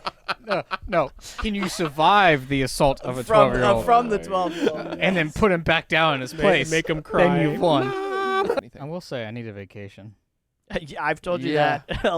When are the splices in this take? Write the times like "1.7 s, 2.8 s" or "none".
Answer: 8.6 s